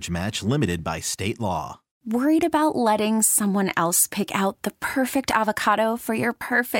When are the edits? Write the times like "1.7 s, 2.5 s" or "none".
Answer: 1.9 s

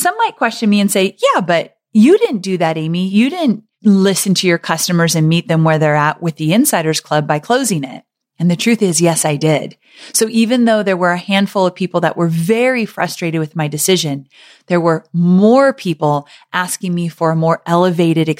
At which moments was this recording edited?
none

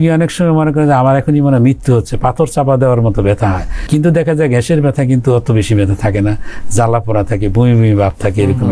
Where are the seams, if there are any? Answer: 3.7 s

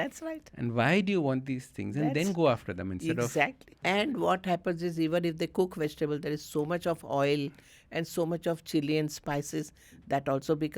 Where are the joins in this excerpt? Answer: 3.8 s

